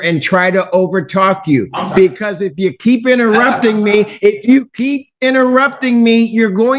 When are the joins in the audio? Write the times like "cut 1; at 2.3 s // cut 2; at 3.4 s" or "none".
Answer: none